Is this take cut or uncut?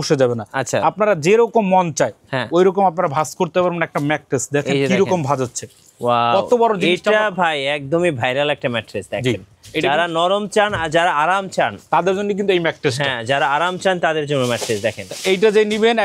uncut